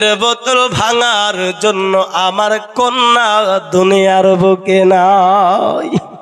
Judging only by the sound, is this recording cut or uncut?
uncut